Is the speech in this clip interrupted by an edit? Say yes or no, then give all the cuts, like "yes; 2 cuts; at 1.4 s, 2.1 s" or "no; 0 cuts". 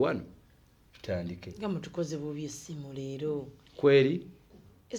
no; 0 cuts